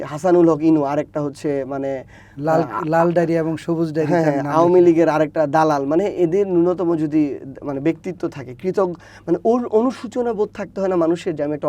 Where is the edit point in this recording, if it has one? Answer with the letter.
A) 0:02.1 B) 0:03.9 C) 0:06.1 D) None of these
D